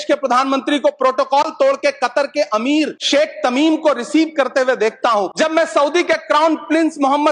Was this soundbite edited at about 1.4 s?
no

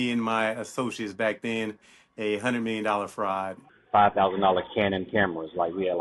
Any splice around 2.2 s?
no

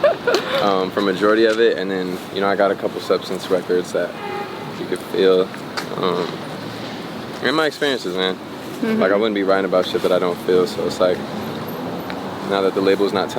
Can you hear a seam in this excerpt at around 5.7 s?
no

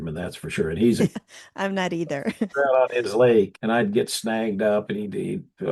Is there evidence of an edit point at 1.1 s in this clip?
yes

